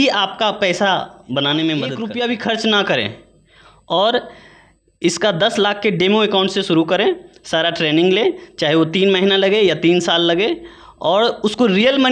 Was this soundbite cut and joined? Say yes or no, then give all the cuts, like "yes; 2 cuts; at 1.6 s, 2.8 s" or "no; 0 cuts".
yes; 1 cut; at 2.0 s